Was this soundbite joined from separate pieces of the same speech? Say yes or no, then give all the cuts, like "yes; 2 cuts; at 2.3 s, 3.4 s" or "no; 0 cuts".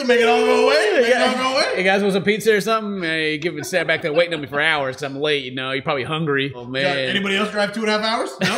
no; 0 cuts